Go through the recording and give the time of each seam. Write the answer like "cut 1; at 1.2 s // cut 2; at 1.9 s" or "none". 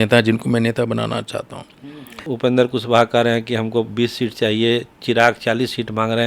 cut 1; at 2.2 s